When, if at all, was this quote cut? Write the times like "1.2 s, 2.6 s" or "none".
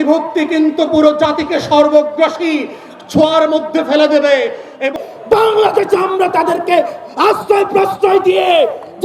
4.9 s